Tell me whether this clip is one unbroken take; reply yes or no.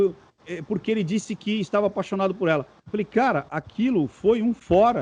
yes